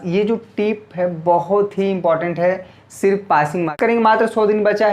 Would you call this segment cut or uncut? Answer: cut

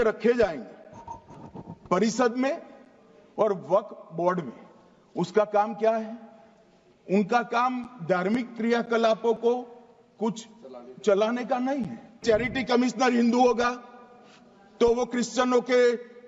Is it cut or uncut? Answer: cut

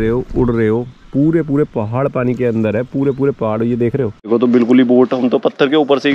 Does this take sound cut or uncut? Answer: cut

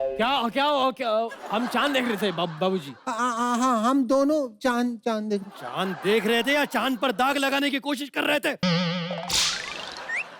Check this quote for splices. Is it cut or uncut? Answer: uncut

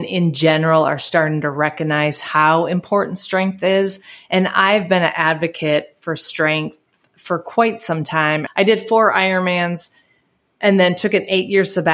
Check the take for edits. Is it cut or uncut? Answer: cut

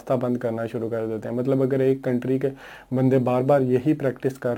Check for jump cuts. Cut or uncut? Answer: uncut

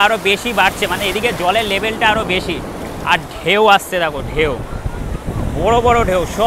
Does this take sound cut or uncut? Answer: uncut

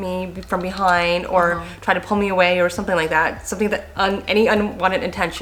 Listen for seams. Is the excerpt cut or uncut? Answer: uncut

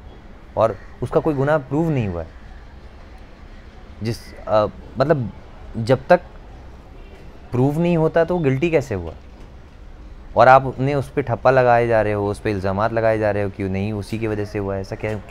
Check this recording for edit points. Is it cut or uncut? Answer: uncut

